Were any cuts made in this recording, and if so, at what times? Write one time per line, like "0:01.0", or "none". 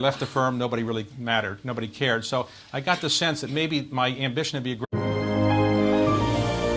none